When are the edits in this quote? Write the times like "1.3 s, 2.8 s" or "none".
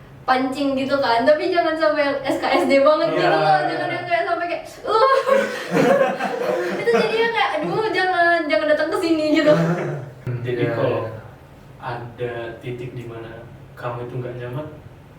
10.3 s